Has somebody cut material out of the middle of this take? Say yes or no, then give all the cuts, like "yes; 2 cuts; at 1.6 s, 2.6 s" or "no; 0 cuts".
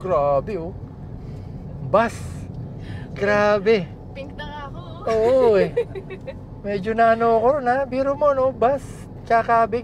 no; 0 cuts